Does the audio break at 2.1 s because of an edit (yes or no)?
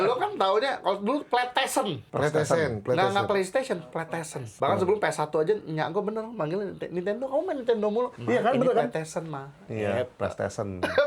yes